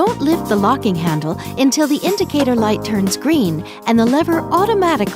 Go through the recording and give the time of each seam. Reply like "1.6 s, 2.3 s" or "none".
none